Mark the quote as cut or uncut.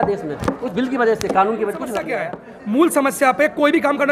cut